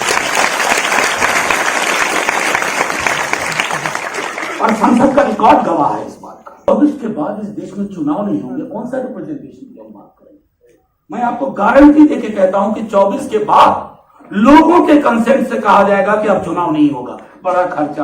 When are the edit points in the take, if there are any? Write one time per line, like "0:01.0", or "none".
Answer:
0:06.7